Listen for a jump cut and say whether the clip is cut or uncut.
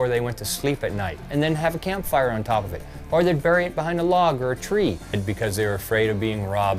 cut